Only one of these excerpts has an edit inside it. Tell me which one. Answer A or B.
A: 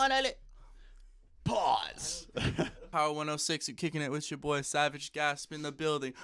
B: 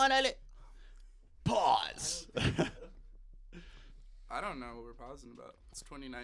A